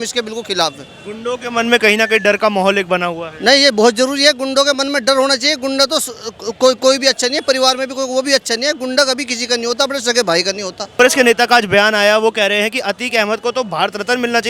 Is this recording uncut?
no; 1 cut; at 11.0 s

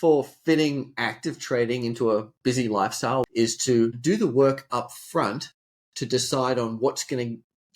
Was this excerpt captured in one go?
no; 1 cut; at 3.2 s

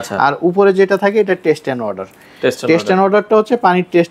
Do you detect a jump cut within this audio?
no; 0 cuts

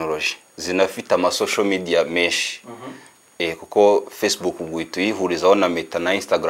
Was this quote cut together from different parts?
no; 0 cuts

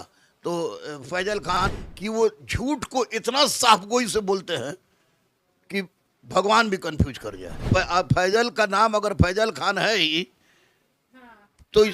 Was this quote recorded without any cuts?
no; 2 cuts; at 1.6 s, 7.6 s

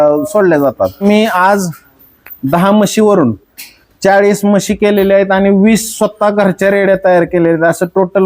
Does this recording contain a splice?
yes; 1 cut; at 1.0 s

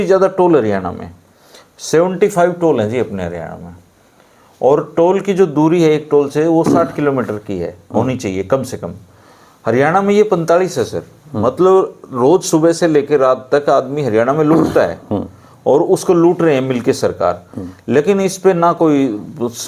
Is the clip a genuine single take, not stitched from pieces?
yes; 0 cuts

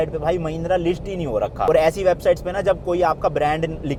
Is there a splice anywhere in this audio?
no; 0 cuts

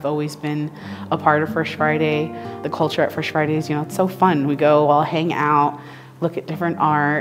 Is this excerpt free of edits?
no; 1 cut; at 2.5 s

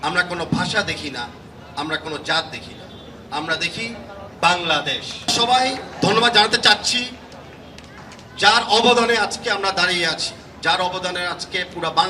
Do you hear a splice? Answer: yes; 1 cut; at 5.3 s

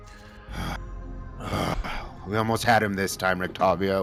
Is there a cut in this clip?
no; 0 cuts

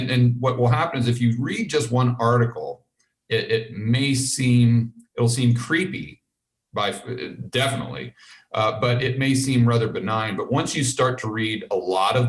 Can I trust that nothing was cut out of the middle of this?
yes; 0 cuts

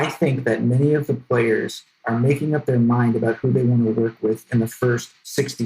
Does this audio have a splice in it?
yes; 1 cut; at 2.0 s

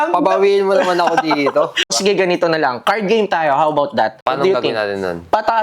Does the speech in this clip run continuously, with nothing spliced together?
no; 2 cuts; at 2.0 s, 4.2 s

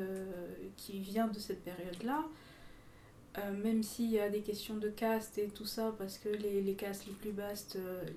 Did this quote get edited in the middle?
no; 0 cuts

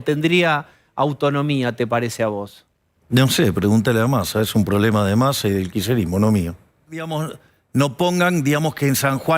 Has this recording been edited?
yes; 1 cut; at 7.1 s

